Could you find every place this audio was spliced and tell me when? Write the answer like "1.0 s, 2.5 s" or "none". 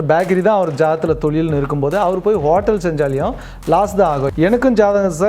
4.2 s